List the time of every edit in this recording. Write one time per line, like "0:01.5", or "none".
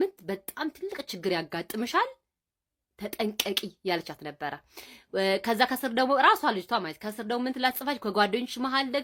none